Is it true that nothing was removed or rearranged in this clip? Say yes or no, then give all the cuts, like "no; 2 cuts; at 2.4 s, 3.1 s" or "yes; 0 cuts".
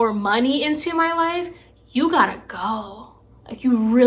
yes; 0 cuts